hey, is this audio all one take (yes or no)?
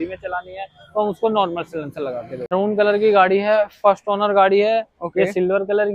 no